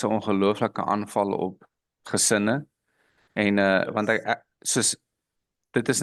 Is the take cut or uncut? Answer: uncut